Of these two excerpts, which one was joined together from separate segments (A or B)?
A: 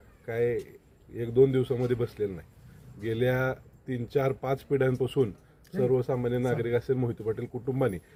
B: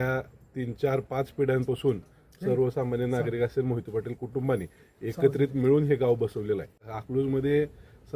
B